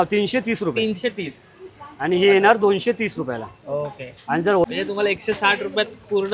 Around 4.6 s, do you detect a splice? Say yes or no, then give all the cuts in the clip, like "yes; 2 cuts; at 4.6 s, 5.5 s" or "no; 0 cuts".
yes; 1 cut; at 4.6 s